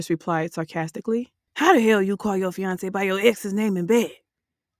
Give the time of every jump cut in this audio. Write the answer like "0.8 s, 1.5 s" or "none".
1.4 s